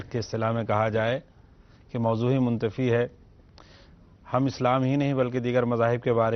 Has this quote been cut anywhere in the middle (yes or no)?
no